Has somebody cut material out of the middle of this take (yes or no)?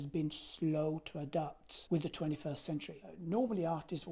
yes